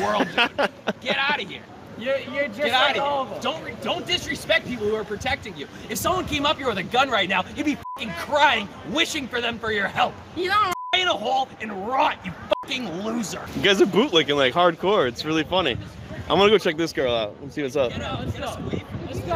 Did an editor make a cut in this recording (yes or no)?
yes